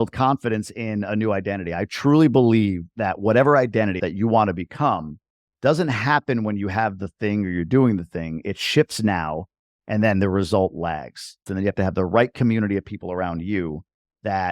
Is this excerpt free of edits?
no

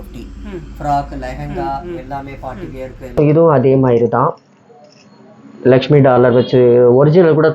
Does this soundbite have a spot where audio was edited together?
yes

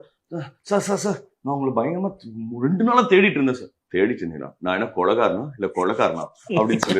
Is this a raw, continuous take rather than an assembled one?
yes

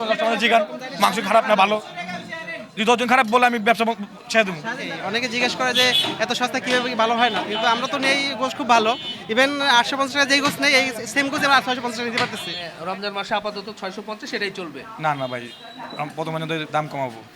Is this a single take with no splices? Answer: no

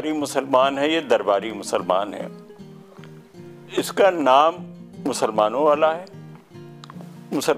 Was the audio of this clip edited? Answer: no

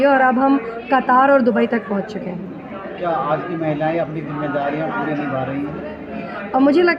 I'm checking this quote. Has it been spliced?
no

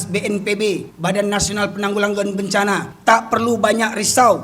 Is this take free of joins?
no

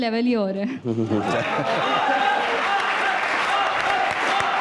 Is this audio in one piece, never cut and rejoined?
yes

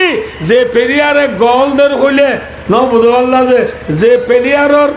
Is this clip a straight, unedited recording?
yes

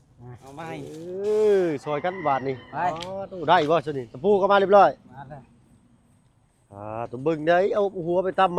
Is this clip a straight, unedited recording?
yes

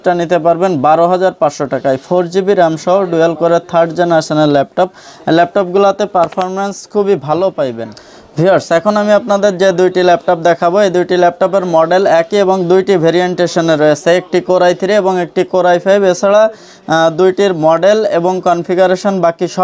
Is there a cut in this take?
no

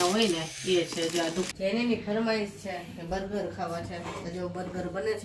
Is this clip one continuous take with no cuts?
no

